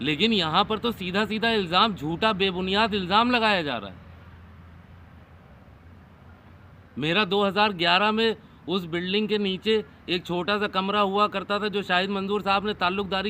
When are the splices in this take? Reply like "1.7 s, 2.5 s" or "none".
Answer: none